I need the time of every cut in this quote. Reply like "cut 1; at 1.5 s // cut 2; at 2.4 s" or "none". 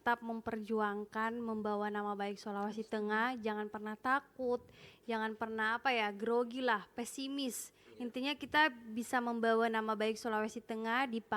none